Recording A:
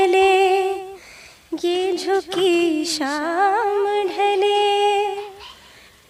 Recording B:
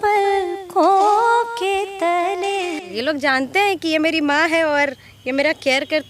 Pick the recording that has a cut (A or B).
B